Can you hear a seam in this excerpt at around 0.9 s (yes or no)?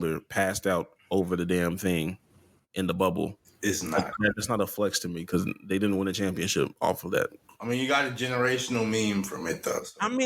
no